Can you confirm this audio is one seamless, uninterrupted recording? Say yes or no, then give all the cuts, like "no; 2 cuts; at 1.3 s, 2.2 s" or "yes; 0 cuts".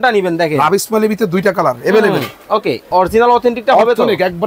no; 1 cut; at 2.8 s